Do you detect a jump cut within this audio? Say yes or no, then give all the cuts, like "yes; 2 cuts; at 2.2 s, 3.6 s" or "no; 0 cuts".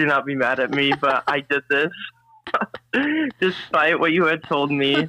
no; 0 cuts